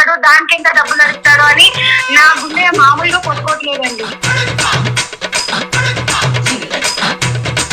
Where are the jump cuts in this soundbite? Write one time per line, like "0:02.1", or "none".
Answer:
0:04.2